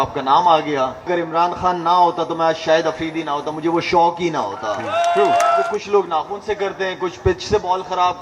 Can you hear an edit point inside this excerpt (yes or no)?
yes